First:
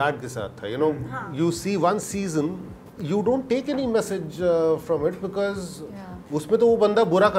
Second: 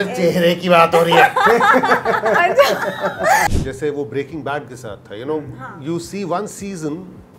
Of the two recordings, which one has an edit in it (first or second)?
second